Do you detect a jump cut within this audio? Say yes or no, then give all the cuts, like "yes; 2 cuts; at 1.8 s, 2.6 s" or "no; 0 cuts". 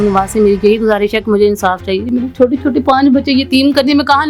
no; 0 cuts